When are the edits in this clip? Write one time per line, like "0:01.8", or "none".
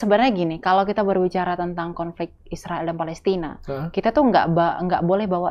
none